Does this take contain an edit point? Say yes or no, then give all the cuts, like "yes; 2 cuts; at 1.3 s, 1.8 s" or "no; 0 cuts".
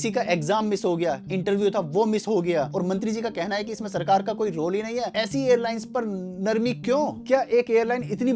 yes; 4 cuts; at 1.3 s, 2.7 s, 5.1 s, 7.2 s